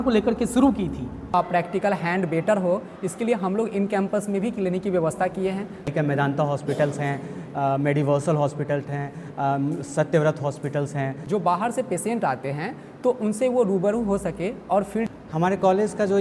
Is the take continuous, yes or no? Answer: no